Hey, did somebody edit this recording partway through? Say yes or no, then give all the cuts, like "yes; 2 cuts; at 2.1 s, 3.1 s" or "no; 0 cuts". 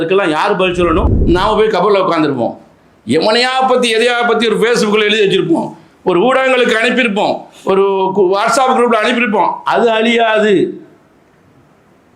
yes; 1 cut; at 1.1 s